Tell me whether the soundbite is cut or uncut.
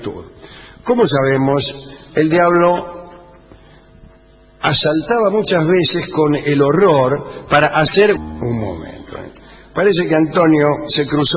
uncut